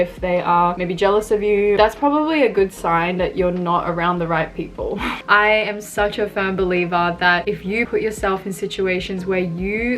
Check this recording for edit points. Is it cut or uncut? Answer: cut